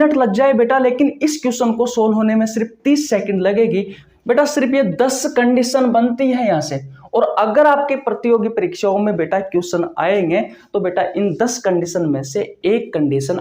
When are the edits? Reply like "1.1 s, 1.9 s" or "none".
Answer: 4.0 s